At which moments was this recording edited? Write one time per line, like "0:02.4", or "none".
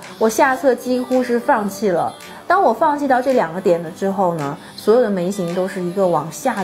none